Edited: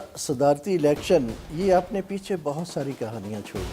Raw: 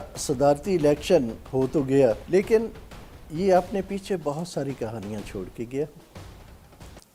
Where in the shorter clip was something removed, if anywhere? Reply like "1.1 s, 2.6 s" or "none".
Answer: 1.4 s